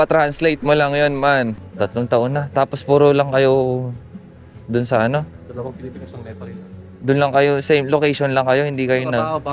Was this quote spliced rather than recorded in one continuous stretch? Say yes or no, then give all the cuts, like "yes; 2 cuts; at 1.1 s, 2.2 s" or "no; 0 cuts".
yes; 1 cut; at 1.6 s